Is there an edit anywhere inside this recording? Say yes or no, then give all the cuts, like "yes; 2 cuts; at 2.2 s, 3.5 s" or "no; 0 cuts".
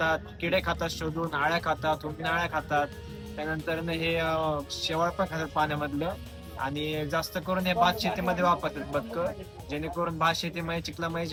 no; 0 cuts